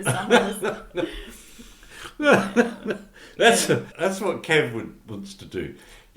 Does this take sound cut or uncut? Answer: cut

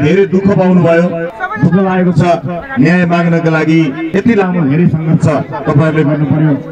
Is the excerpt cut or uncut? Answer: cut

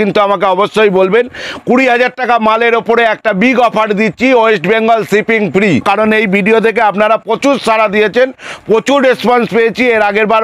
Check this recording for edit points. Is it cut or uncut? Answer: cut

